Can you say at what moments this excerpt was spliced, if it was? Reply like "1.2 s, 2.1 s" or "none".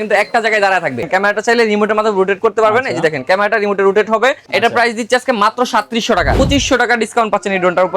1.1 s, 4.4 s, 6.4 s